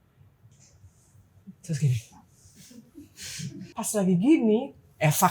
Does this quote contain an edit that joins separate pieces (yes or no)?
yes